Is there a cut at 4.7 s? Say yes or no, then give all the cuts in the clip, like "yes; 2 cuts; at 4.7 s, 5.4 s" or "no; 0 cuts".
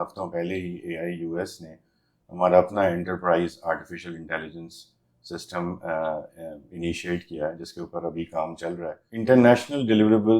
no; 1 cut; at 9.3 s